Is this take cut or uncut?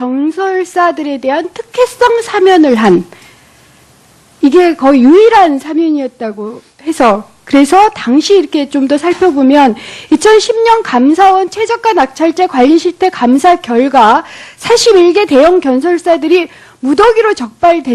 cut